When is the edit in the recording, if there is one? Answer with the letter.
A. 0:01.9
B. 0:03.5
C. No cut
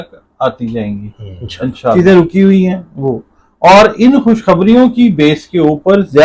A